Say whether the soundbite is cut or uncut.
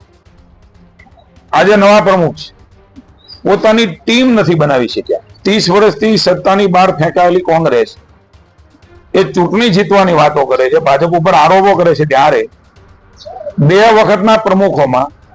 cut